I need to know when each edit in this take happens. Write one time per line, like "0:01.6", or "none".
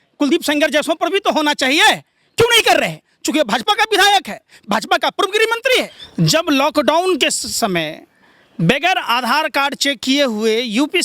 0:06.0

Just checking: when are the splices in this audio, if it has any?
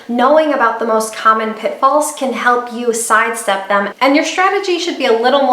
0:03.9

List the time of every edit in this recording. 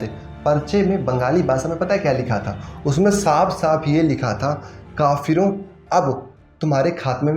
none

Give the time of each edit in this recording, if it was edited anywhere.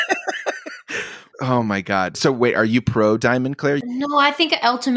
0:01.2
0:02.1
0:03.8

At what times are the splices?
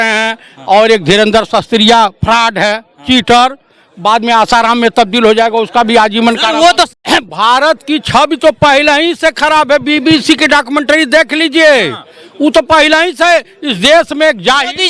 0:07.0

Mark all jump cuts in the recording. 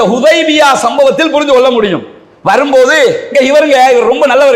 none

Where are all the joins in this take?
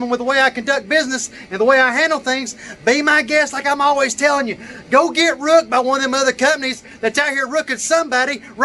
none

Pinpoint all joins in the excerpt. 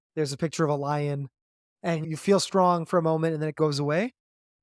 0:02.0
0:03.5

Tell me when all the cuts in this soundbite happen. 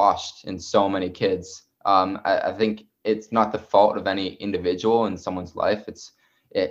none

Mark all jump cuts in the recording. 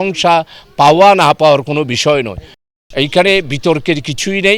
0:02.7

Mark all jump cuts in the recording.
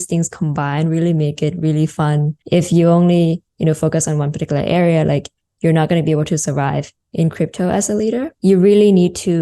0:02.4
0:08.3

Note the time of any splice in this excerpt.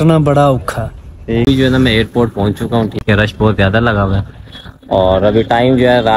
0:01.4
0:03.0

